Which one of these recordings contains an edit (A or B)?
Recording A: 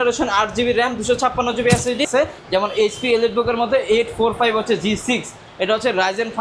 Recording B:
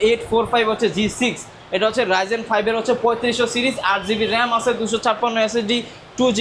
A